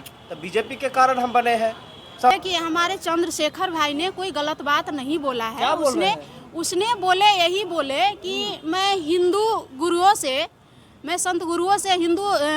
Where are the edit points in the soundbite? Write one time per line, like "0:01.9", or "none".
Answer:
0:02.3

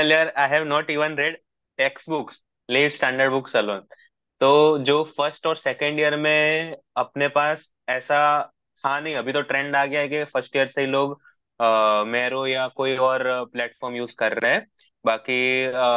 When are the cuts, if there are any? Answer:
none

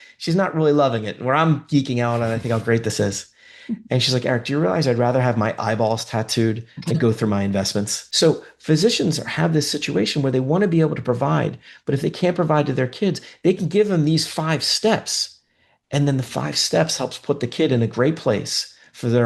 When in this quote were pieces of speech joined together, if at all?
0:08.0

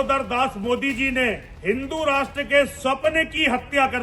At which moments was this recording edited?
0:01.5

